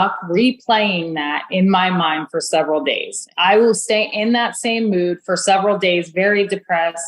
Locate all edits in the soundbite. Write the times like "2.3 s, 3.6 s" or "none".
3.3 s